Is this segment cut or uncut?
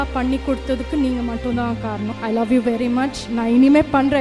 cut